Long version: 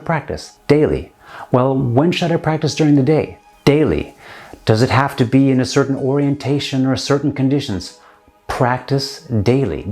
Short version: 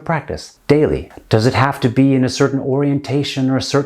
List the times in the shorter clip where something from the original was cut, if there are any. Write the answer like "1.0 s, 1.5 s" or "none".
1.1 s